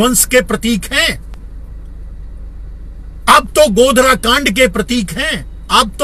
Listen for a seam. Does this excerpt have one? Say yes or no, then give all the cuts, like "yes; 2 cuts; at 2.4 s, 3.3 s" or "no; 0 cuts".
no; 0 cuts